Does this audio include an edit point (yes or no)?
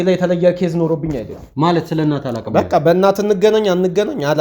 yes